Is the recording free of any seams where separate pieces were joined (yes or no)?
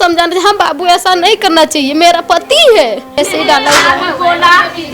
no